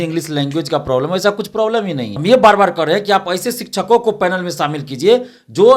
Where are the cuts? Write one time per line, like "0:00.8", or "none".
0:02.0